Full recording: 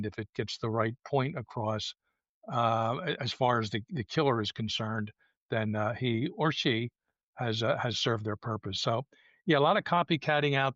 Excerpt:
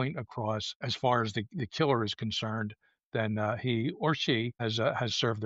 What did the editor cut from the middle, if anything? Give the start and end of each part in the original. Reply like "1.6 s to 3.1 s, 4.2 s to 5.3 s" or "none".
2.1 s to 3.2 s, 6.9 s to 7.4 s